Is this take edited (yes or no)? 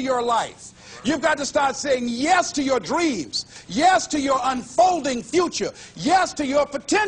no